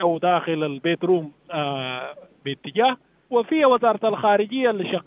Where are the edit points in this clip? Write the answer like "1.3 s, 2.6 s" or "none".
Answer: 3.1 s